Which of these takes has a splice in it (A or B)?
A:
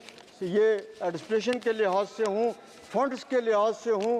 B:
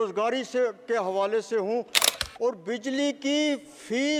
B